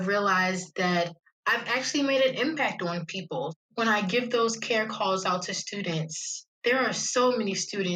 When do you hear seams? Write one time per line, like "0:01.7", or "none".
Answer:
0:01.2
0:03.6